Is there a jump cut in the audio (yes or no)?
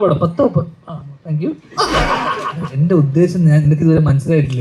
yes